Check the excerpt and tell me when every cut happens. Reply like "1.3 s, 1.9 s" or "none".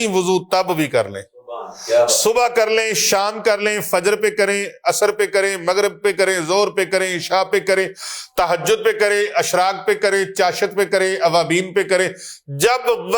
none